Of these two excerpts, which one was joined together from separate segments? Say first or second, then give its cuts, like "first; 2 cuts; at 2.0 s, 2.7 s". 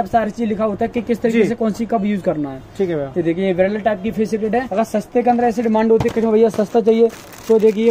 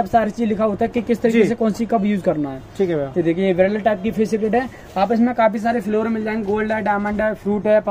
first; 1 cut; at 4.7 s